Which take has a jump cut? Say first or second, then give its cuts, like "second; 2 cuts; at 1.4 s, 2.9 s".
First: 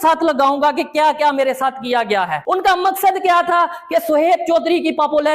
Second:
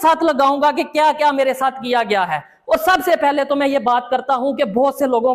first; 1 cut; at 2.4 s